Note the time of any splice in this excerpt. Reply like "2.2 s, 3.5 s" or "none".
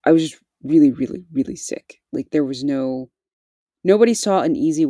none